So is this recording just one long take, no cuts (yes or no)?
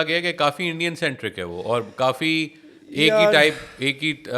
yes